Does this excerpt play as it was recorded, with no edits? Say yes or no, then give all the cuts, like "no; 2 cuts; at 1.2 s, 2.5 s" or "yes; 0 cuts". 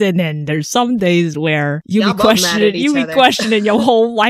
no; 1 cut; at 1.8 s